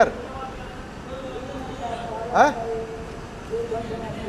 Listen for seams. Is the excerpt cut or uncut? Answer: uncut